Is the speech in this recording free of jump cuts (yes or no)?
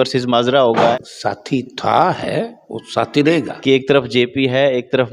no